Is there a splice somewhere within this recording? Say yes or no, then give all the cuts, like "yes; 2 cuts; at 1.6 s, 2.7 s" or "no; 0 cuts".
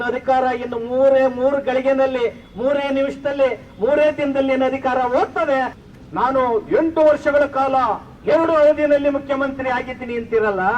yes; 1 cut; at 5.8 s